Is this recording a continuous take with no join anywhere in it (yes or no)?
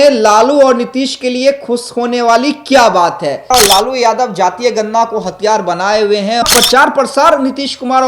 no